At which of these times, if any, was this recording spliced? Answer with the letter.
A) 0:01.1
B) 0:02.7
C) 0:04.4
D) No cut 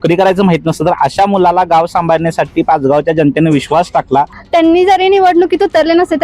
C